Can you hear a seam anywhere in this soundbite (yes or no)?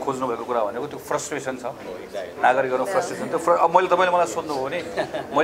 no